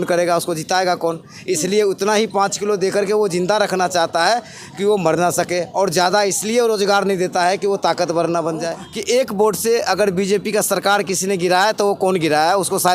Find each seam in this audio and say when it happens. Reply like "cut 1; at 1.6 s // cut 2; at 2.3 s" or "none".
cut 1; at 8.9 s